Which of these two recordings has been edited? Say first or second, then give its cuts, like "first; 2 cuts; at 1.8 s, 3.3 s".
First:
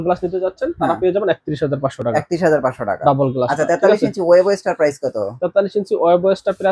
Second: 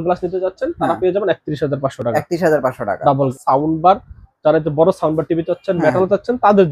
second; 1 cut; at 3.3 s